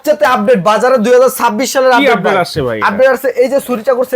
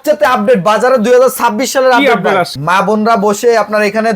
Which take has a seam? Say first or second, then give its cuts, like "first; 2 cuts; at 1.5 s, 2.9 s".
second; 1 cut; at 2.6 s